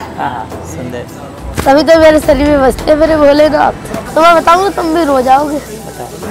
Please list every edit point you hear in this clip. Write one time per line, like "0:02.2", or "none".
0:03.9